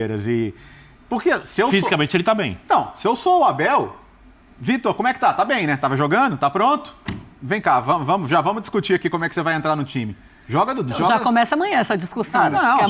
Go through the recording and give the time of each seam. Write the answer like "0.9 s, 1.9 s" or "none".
none